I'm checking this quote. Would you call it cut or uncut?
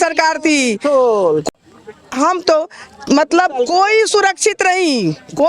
uncut